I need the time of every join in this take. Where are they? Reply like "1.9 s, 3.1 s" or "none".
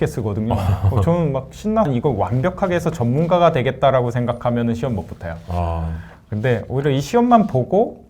1.9 s